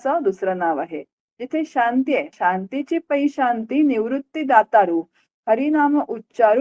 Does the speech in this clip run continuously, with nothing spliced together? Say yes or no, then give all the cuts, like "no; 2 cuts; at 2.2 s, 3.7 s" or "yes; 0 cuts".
no; 1 cut; at 2.3 s